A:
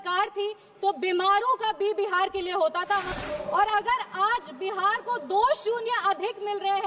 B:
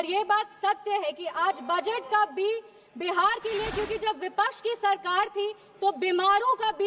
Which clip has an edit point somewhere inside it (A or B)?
A